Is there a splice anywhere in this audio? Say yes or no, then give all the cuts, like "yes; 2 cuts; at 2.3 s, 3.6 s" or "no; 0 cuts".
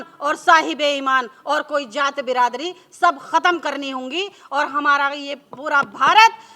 no; 0 cuts